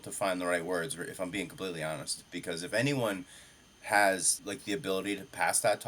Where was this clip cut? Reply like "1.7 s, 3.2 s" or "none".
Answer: 4.3 s